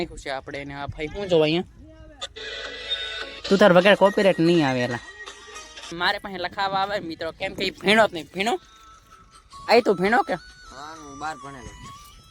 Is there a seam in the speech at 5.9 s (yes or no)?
yes